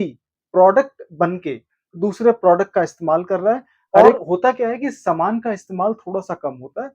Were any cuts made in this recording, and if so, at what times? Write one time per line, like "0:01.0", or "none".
0:04.2